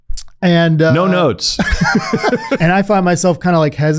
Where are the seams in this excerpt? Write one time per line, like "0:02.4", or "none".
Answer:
0:02.6